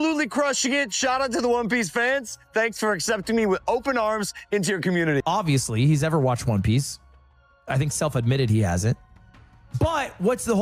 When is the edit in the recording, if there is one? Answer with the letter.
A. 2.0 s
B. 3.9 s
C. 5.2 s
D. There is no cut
C